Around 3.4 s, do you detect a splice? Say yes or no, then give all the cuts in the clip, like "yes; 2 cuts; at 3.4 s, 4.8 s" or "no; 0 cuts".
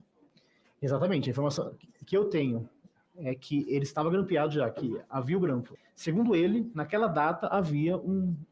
no; 1 cut; at 5.7 s